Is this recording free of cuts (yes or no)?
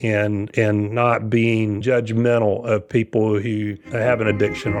no